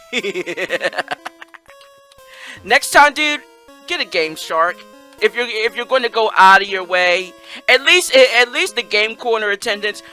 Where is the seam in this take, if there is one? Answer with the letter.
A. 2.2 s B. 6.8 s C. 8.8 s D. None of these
D